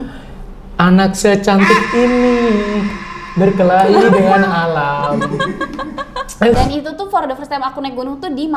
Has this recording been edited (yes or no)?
yes